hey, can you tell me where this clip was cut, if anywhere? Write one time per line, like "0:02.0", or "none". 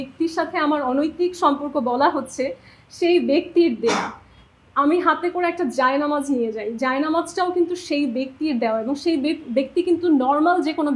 none